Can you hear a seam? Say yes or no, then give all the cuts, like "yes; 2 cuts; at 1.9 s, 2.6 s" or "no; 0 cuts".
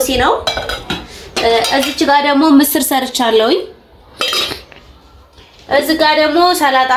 no; 0 cuts